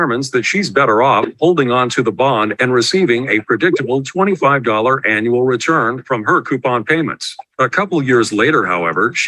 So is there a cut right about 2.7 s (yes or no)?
yes